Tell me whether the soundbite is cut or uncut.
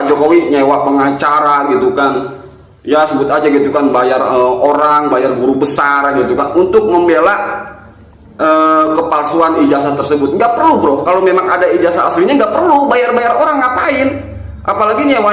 uncut